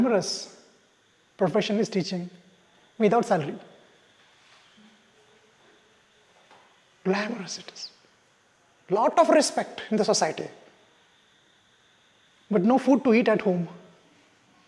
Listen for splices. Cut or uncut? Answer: uncut